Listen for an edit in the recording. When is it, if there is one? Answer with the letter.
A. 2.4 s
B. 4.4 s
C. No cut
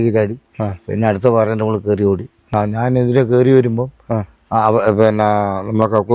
A